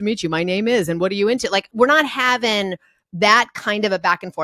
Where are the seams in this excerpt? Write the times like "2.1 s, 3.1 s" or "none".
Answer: 1.7 s

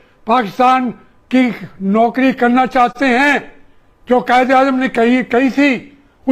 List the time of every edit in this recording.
none

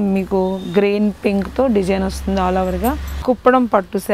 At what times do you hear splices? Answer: 3.1 s

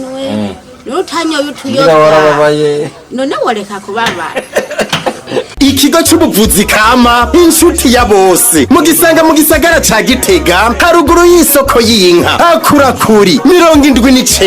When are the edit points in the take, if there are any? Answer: 5.5 s

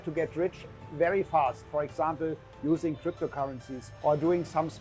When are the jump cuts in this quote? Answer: 3.8 s

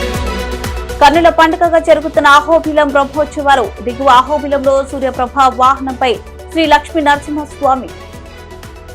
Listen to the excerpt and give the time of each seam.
0.9 s

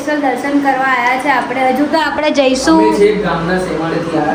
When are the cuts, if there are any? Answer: none

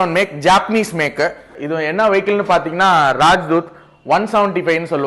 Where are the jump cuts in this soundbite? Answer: 1.6 s

